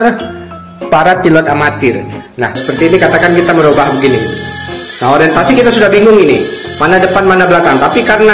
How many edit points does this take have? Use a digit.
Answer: 1